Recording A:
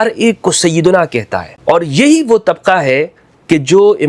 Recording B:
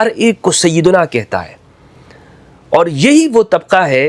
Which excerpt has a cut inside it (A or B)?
A